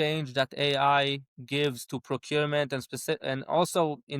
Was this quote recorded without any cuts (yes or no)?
no